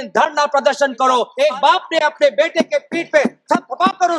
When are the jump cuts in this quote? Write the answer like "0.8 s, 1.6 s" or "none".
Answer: 1.3 s

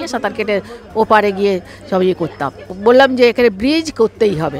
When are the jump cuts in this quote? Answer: 2.7 s

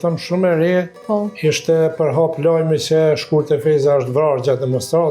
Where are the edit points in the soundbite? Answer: 1.0 s

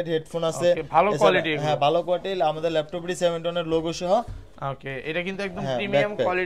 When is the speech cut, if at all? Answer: none

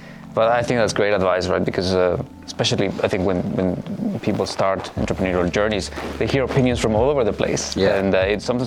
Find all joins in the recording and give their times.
none

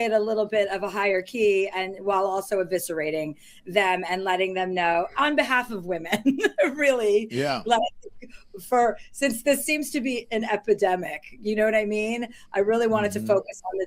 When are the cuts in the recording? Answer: none

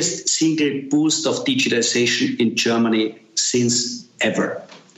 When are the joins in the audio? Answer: none

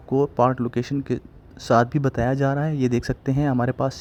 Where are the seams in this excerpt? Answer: none

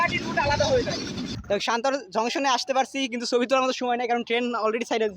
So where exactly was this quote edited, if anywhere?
1.3 s

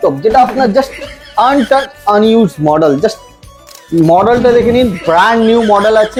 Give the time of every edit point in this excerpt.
none

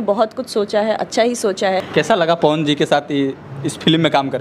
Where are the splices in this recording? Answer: 1.9 s

